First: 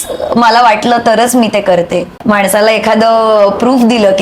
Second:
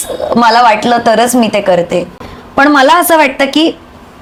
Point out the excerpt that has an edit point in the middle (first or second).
first